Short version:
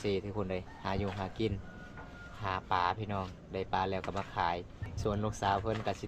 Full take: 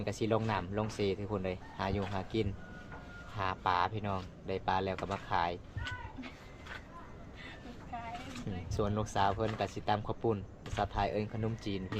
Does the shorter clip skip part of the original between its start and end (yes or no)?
yes